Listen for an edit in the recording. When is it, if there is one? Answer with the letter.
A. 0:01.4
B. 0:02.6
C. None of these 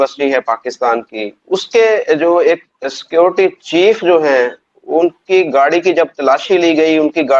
A